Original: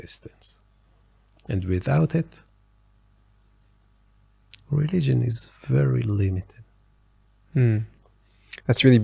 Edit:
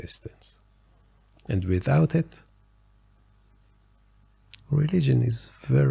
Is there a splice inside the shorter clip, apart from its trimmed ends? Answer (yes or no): no